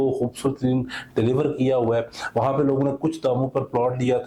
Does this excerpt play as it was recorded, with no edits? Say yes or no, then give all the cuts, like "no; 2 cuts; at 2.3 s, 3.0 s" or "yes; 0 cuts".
yes; 0 cuts